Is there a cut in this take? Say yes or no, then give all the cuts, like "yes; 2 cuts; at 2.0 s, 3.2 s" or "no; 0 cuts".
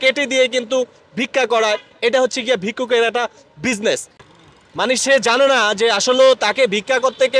yes; 1 cut; at 4.2 s